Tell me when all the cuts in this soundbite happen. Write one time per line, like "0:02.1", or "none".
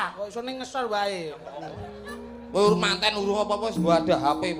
0:01.8